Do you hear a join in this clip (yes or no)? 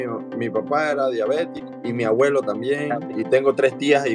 yes